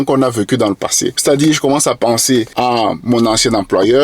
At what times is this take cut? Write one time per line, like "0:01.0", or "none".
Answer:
0:01.1
0:02.5